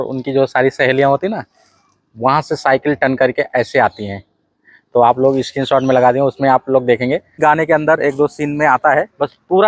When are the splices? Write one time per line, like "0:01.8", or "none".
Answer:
0:07.4